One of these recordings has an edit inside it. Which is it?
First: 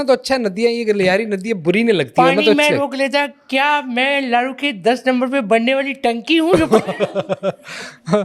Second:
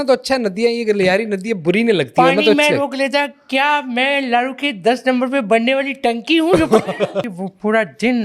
second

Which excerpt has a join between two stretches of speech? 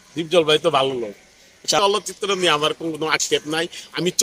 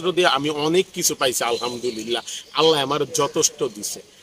first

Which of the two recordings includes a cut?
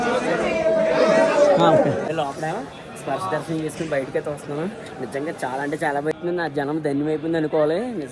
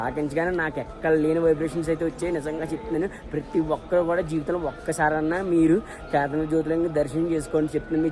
first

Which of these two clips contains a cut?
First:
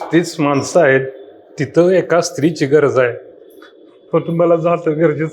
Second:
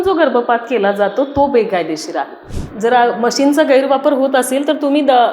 second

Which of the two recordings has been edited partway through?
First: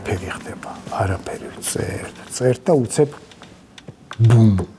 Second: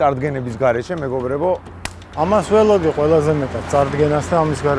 second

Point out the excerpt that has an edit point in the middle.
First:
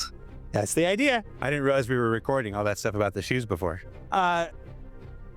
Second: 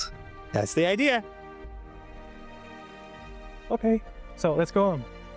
first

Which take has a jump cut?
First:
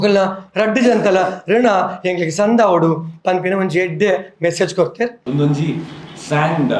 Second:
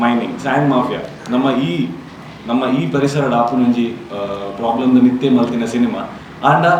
first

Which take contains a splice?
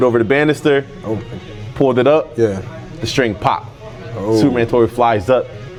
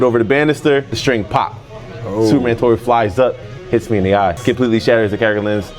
second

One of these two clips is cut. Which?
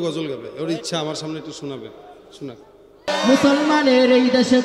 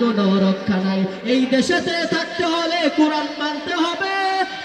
first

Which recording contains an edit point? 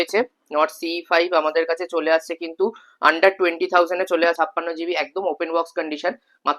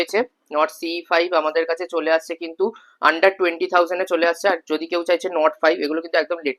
first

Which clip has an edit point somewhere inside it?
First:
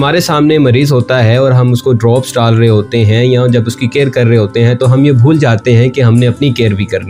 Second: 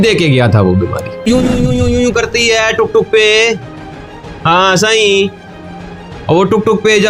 second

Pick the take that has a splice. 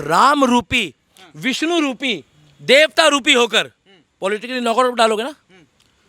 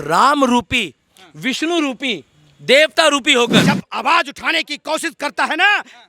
second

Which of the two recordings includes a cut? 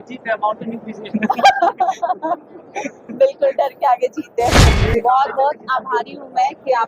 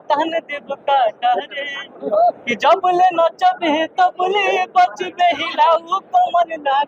first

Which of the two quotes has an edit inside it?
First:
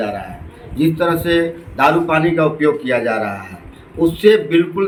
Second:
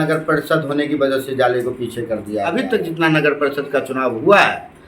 second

